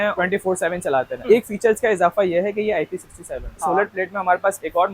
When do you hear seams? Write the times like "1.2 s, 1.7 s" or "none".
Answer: 1.2 s, 3.6 s